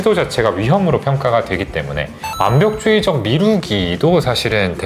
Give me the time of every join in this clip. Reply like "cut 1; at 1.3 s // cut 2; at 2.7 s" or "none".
cut 1; at 2.2 s

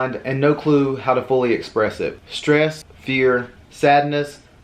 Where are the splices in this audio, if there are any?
cut 1; at 2.7 s // cut 2; at 3.6 s

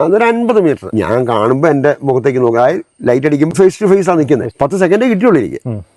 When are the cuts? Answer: cut 1; at 0.9 s // cut 2; at 3.5 s // cut 3; at 4.5 s

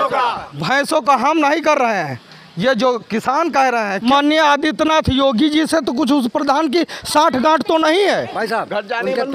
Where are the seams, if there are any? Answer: cut 1; at 3.9 s // cut 2; at 8.3 s

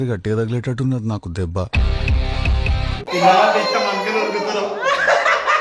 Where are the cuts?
none

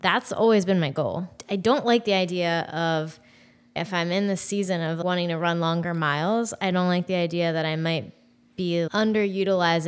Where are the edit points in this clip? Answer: cut 1; at 1.3 s // cut 2; at 3.8 s // cut 3; at 5.0 s // cut 4; at 8.9 s

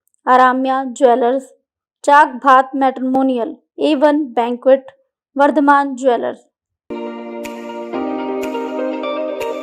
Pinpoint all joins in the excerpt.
cut 1; at 6.8 s

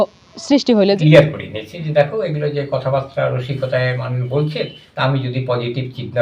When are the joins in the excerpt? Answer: cut 1; at 1.0 s // cut 2; at 4.8 s

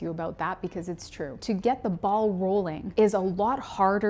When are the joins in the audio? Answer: cut 1; at 1.4 s // cut 2; at 2.8 s

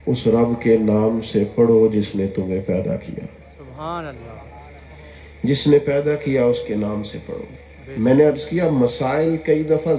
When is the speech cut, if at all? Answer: none

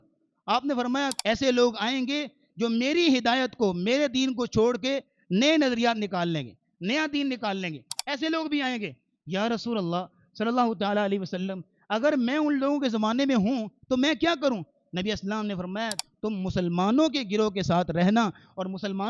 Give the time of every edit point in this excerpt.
cut 1; at 1.1 s // cut 2; at 16.0 s

